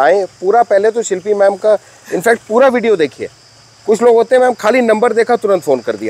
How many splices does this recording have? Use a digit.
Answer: 0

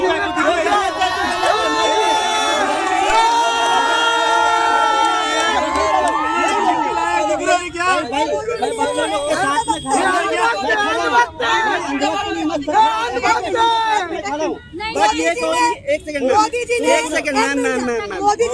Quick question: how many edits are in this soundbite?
0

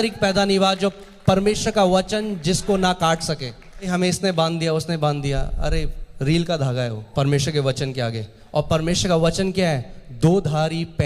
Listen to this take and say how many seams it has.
2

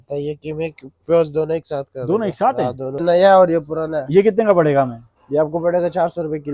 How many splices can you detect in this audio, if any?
1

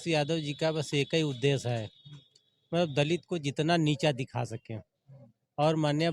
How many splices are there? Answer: 0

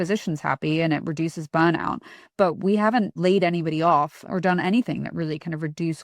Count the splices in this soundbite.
1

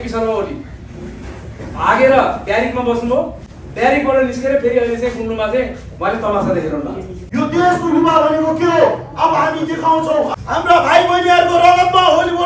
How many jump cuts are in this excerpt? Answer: 2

